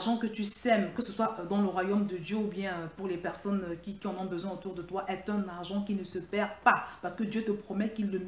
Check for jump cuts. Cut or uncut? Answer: uncut